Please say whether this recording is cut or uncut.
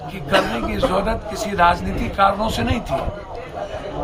uncut